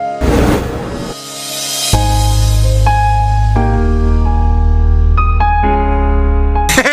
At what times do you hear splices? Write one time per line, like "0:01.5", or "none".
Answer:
0:04.0